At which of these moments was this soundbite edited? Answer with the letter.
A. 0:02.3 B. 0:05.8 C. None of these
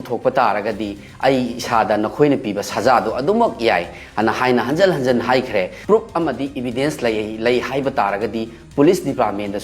B